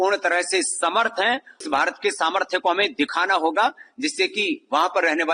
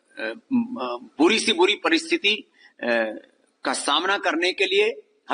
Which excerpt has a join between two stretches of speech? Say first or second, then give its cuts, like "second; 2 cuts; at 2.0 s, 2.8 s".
first; 1 cut; at 1.6 s